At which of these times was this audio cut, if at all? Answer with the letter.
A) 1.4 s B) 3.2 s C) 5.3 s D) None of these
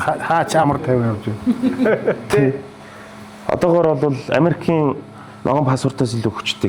D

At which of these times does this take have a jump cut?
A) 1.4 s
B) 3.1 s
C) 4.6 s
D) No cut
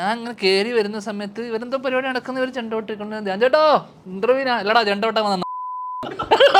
D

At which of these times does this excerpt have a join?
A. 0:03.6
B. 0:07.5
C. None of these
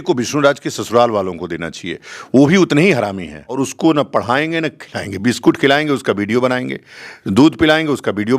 A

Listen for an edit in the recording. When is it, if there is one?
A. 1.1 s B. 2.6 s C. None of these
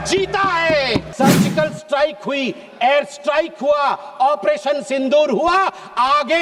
A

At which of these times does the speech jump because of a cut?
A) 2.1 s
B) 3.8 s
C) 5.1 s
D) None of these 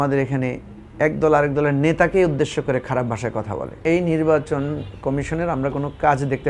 B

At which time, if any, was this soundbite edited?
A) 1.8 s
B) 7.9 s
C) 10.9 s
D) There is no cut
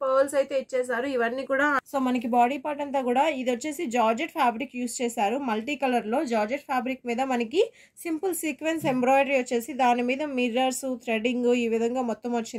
A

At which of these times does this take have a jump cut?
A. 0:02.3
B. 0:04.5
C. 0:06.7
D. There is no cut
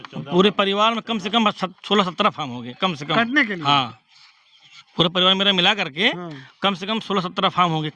D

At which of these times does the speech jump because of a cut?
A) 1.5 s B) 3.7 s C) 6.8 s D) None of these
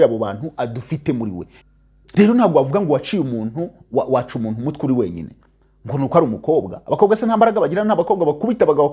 A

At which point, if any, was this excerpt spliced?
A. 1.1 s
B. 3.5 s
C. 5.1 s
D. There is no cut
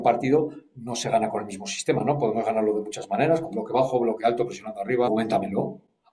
C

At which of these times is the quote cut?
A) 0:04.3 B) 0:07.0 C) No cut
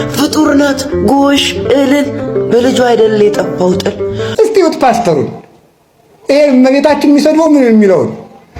A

